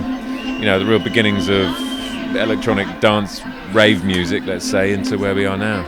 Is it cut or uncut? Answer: uncut